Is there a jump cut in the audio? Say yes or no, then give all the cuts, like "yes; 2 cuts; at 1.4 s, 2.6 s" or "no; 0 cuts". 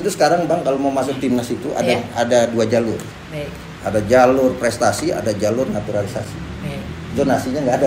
no; 0 cuts